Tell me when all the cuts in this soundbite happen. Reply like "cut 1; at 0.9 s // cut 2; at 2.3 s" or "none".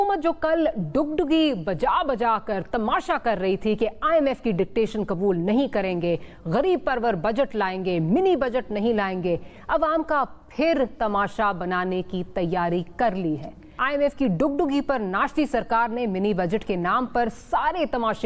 cut 1; at 9.6 s // cut 2; at 13.8 s